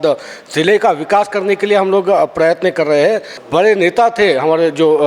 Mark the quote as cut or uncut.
cut